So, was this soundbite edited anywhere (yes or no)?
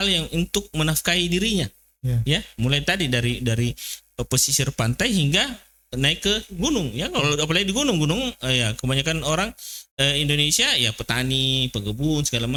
no